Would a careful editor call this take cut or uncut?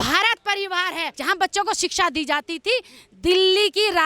cut